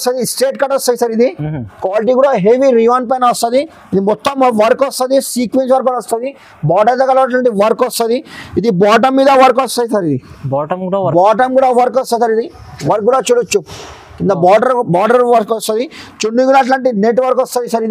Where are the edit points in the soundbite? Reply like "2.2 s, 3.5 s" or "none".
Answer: none

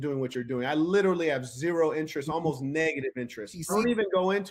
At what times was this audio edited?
3.6 s

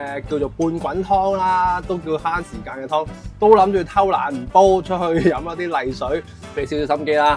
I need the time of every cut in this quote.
6.4 s

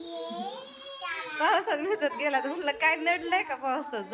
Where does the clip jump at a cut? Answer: none

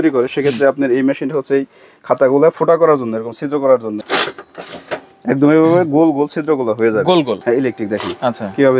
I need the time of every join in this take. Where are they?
4.0 s, 7.3 s

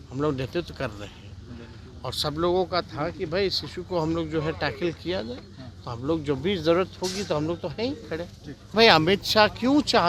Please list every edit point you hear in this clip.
8.7 s

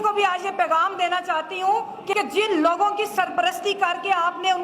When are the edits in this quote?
2.1 s

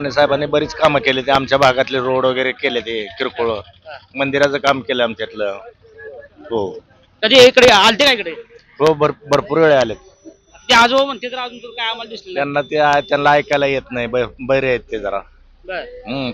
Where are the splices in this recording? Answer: none

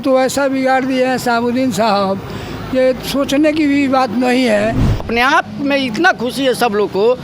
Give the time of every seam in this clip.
5.0 s

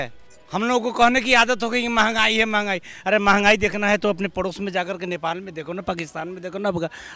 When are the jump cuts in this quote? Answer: none

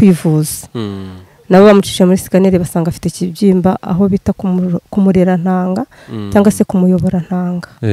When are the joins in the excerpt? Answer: none

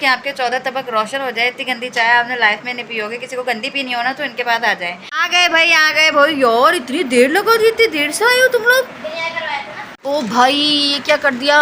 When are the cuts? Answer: 5.1 s, 9.9 s

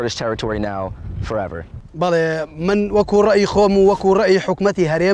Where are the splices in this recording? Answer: 1.8 s

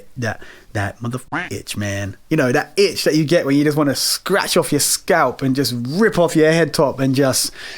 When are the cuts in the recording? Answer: 1.2 s

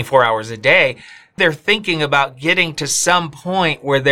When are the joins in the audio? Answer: 1.4 s

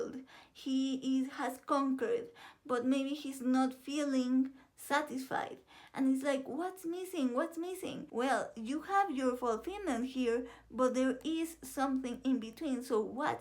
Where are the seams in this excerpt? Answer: 8.0 s

